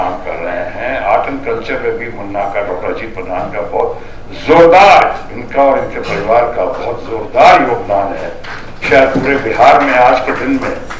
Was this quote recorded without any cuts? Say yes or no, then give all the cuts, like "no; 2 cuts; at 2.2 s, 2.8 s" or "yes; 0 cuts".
yes; 0 cuts